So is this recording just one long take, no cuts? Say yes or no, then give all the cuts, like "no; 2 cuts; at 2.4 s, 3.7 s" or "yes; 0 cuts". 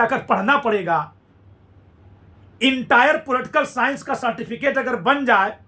yes; 0 cuts